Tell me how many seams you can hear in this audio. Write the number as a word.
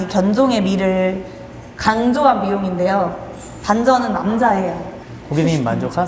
one